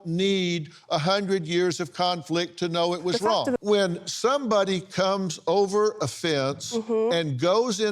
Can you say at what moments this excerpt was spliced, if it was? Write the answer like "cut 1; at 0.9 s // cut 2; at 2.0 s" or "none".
cut 1; at 3.5 s